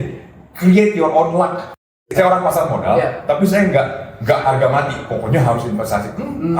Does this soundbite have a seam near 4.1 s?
no; 1 cut; at 1.9 s

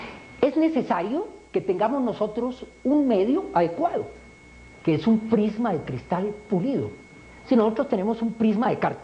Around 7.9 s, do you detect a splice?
no; 1 cut; at 5.7 s

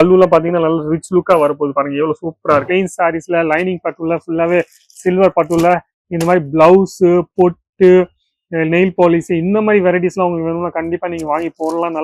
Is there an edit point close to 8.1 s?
no; 1 cut; at 2.7 s

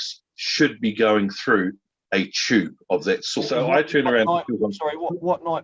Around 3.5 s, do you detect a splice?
yes; 1 cut; at 3.5 s

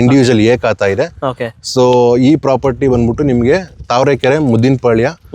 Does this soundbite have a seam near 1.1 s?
no; 0 cuts

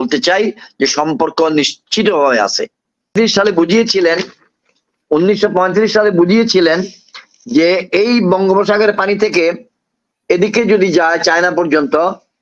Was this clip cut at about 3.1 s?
yes; 1 cut; at 3.1 s

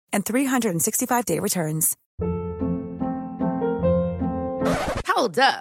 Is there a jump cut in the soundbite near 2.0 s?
yes; 1 cut; at 2.0 s

